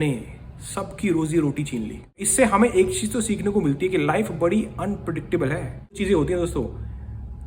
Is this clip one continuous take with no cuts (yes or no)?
no